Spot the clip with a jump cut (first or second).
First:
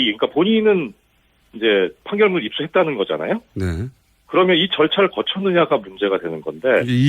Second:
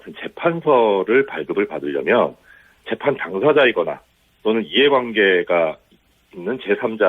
first